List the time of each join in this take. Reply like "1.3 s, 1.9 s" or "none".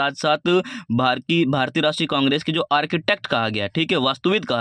none